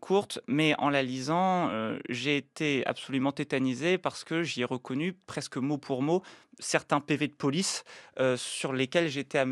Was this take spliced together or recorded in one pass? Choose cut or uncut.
uncut